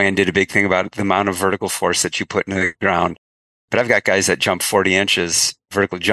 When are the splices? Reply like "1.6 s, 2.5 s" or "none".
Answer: 2.7 s